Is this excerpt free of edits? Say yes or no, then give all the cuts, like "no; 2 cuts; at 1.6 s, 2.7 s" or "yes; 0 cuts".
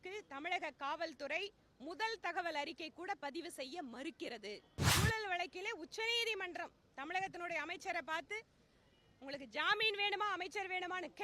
no; 1 cut; at 4.7 s